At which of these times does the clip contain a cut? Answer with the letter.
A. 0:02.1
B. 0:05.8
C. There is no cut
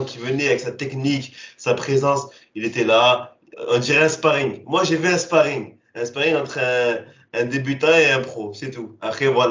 C